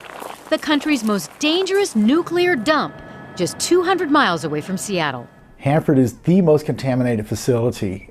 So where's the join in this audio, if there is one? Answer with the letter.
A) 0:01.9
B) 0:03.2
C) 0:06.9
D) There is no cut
A